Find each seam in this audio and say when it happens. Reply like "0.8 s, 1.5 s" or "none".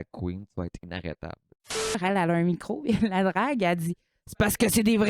2.0 s